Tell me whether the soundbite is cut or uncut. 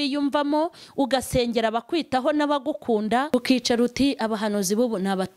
cut